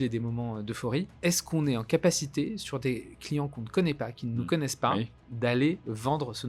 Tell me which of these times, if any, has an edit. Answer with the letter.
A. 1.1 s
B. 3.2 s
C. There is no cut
A